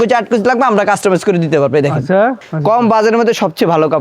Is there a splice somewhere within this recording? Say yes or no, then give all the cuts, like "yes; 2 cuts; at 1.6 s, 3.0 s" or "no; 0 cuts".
yes; 1 cut; at 2.4 s